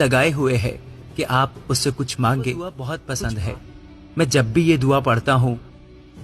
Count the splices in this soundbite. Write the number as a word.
one